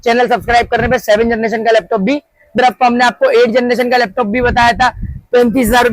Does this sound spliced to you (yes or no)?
yes